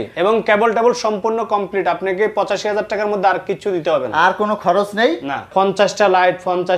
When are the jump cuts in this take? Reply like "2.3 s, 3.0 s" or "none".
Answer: 5.5 s